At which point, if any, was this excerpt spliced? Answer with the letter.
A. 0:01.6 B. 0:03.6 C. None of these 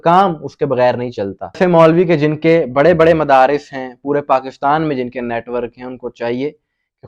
A